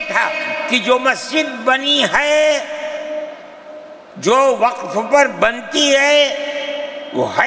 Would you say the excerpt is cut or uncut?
uncut